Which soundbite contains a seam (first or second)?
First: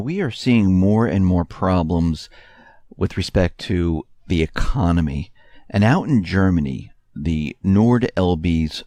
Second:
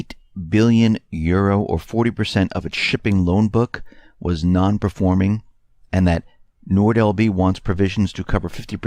second